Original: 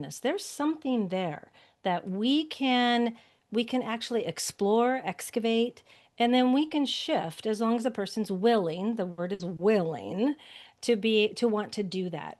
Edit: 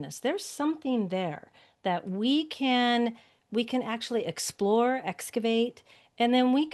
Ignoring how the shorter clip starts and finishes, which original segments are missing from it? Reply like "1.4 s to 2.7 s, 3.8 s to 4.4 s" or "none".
none